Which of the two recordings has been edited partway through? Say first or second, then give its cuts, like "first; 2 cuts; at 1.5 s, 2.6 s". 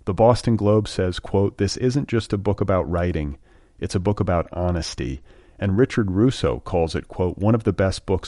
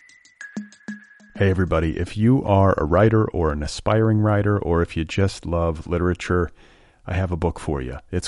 second; 1 cut; at 0.9 s